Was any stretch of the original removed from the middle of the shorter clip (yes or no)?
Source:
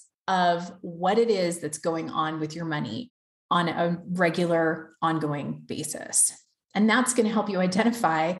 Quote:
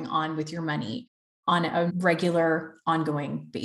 yes